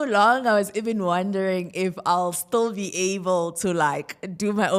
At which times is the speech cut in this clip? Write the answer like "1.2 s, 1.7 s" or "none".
none